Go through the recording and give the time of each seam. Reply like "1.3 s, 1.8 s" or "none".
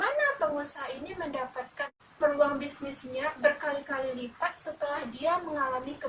1.9 s